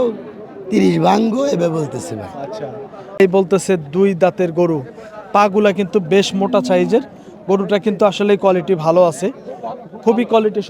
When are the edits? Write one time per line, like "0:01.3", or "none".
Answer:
0:03.2